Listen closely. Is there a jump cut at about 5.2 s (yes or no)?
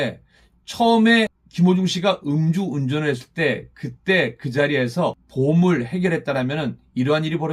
yes